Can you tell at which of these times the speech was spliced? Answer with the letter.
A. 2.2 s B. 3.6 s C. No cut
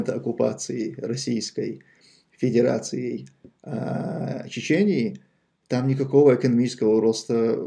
C